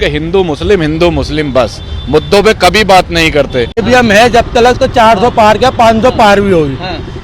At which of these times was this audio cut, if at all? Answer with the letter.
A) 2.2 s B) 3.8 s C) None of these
B